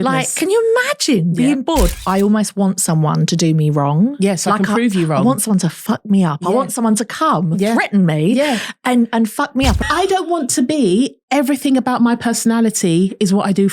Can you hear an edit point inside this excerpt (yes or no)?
yes